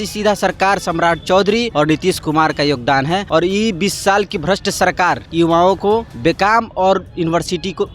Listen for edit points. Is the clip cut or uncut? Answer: cut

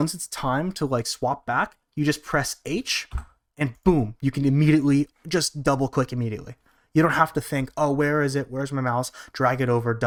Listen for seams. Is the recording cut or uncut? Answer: uncut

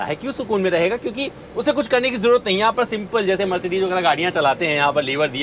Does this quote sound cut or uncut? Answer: uncut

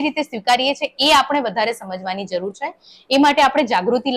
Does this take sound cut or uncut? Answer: uncut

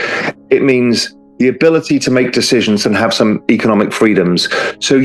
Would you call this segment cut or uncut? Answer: uncut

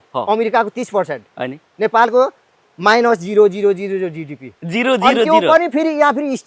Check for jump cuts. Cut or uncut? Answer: uncut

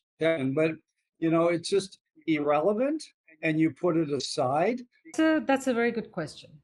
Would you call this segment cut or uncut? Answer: cut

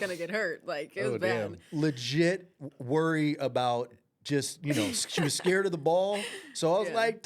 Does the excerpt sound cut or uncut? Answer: uncut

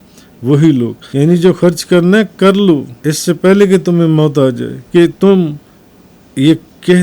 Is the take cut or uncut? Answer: cut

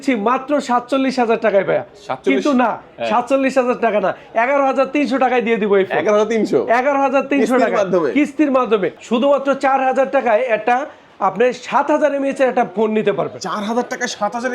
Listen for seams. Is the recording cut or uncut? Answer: cut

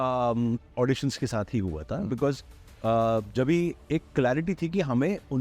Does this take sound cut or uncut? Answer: uncut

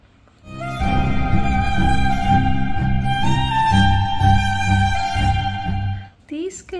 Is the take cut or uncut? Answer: uncut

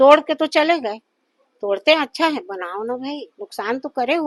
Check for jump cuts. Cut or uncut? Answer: uncut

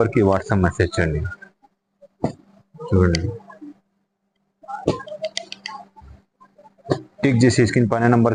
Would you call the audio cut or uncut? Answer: uncut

